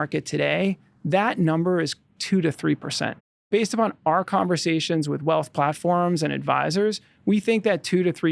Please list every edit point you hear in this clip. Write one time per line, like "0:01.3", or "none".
0:03.5